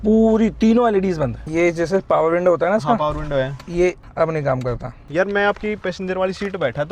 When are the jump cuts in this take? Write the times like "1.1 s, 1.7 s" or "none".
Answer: 1.4 s, 4.1 s, 5.0 s